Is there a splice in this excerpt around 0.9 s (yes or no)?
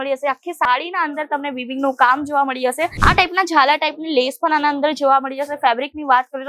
no